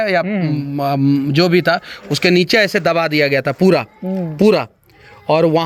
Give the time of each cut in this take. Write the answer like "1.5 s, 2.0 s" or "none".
none